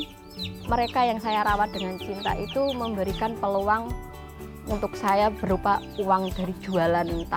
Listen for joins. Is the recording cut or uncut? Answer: uncut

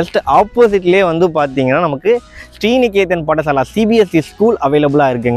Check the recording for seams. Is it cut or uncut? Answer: uncut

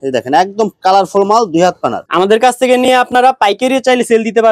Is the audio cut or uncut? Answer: uncut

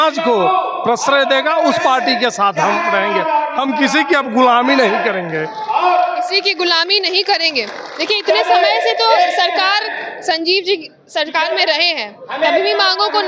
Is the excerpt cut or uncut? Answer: uncut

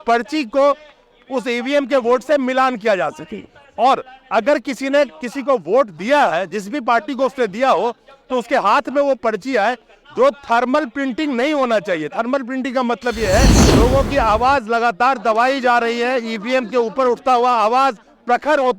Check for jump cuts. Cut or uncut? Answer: cut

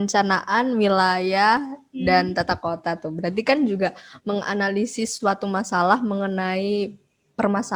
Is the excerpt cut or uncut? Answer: uncut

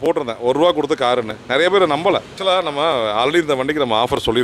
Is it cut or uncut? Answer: cut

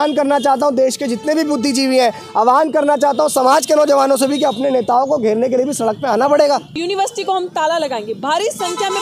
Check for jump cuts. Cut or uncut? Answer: cut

